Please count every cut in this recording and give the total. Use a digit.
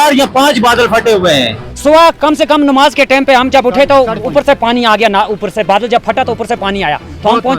1